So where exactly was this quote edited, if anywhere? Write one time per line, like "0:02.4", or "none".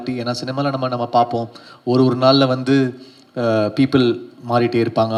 none